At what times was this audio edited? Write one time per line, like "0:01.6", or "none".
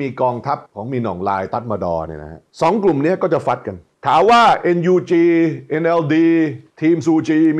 none